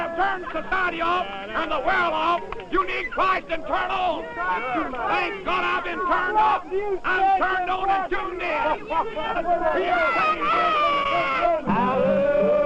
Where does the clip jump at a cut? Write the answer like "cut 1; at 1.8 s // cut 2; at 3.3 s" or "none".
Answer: none